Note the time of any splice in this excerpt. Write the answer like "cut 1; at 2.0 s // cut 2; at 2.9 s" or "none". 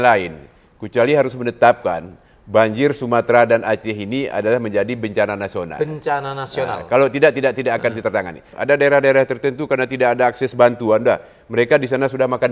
cut 1; at 8.5 s